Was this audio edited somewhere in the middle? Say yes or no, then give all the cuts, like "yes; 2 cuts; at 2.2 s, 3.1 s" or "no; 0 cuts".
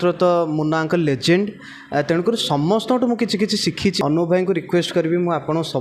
yes; 1 cut; at 4.0 s